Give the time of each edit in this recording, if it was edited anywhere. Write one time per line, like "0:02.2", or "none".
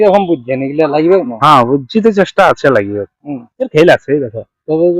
0:03.6